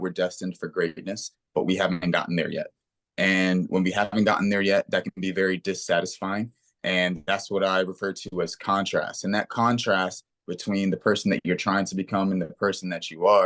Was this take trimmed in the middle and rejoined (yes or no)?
no